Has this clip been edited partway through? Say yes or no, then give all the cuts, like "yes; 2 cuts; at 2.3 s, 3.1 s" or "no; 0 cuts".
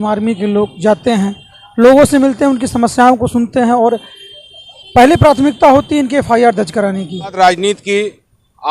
yes; 1 cut; at 7.3 s